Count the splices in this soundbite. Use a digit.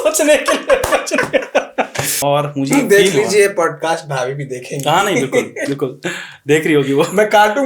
1